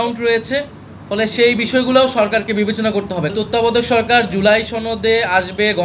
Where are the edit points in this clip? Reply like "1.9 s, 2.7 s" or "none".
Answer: 3.3 s

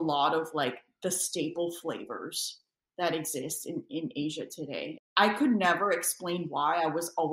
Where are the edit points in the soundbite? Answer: 4.9 s

